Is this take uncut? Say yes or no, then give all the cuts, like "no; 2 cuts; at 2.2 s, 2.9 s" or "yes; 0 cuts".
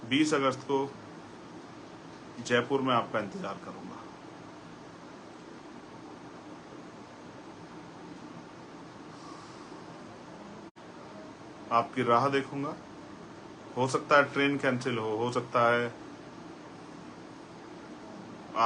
yes; 0 cuts